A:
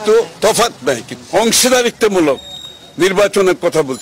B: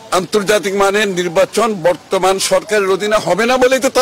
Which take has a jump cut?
A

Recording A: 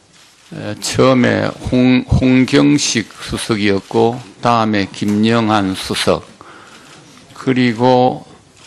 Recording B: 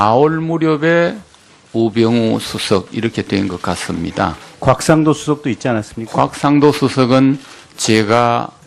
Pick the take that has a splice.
B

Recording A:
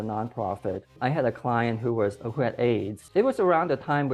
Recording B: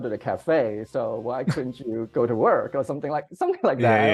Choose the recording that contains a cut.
A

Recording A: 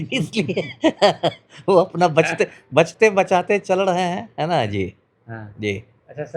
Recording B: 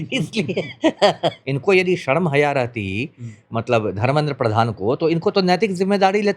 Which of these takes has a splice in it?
B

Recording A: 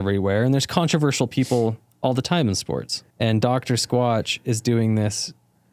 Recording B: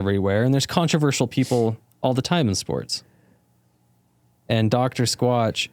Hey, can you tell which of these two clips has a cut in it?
A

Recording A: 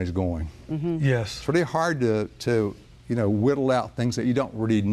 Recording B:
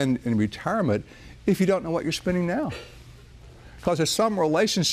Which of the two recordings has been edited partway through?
A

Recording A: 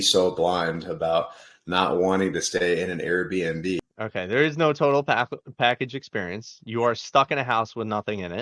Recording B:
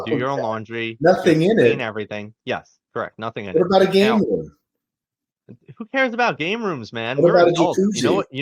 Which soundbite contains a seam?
A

